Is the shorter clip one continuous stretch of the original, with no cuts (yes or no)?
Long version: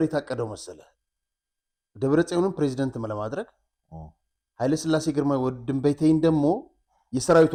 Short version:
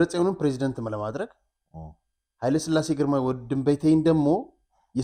yes